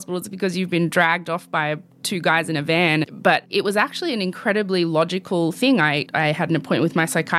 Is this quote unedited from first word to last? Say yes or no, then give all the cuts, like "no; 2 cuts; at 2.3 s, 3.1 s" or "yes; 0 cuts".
no; 3 cuts; at 1.9 s, 3.5 s, 6.0 s